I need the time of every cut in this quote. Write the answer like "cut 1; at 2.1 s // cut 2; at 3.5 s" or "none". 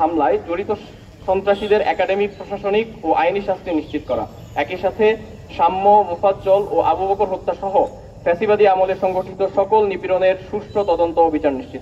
none